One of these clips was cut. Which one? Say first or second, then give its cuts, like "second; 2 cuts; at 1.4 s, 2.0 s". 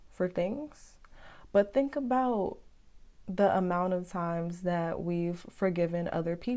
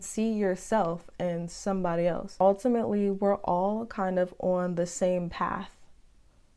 second; 1 cut; at 2.4 s